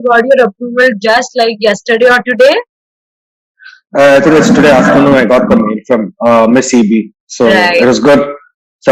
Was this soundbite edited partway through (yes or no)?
no